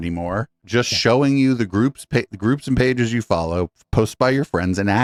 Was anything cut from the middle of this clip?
no; 0 cuts

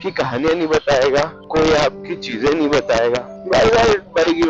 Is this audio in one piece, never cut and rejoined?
no; 2 cuts; at 1.4 s, 3.3 s

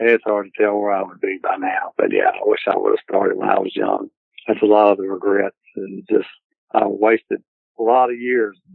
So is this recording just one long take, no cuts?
yes; 0 cuts

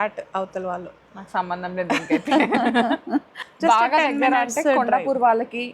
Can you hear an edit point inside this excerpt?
yes; 1 cut; at 3.3 s

